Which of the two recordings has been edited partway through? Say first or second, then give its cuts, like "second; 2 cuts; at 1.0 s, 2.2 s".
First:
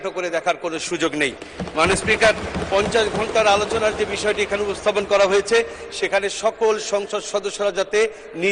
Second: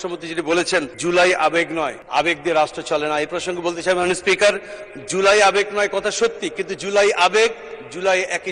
second; 2 cuts; at 0.9 s, 2.0 s